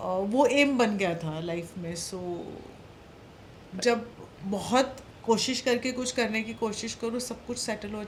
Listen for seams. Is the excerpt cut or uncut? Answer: uncut